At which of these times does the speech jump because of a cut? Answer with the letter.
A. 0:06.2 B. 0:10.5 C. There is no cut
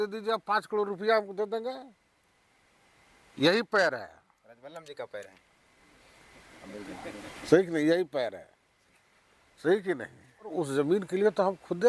B